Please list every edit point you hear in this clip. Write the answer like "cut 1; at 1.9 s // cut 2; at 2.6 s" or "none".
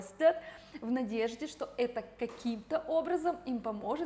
none